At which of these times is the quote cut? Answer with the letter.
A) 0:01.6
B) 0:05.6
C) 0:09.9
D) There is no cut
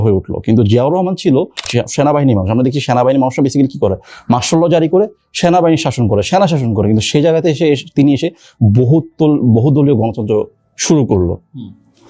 A